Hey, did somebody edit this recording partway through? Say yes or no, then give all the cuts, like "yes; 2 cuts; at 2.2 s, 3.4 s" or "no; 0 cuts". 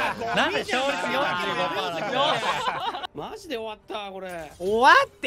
yes; 1 cut; at 3.0 s